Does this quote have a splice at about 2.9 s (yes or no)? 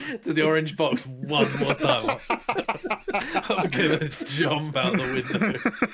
no